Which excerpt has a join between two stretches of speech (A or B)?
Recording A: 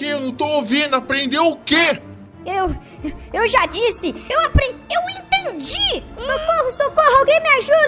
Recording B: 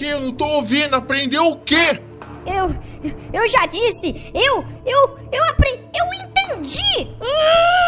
A